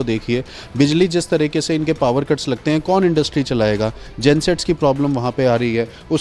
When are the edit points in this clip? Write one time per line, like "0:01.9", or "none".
none